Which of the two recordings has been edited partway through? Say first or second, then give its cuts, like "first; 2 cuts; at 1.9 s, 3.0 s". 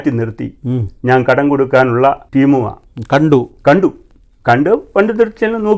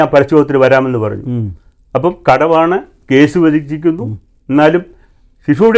first; 1 cut; at 2.2 s